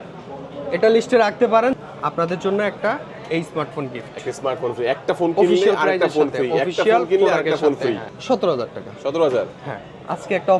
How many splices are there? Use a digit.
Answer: 2